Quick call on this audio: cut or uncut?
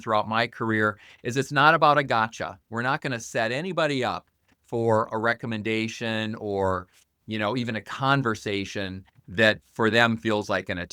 cut